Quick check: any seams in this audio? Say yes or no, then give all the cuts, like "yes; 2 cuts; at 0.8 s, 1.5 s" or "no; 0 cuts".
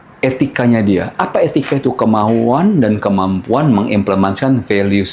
no; 0 cuts